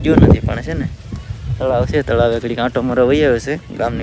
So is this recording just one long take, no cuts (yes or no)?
yes